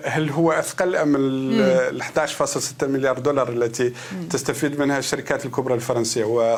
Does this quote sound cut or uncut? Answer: uncut